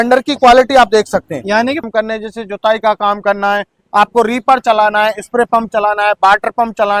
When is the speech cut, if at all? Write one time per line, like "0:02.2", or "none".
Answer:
0:01.9